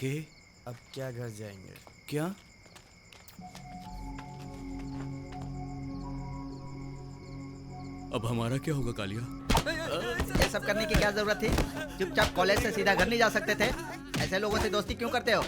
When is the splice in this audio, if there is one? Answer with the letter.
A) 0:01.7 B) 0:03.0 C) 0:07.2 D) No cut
D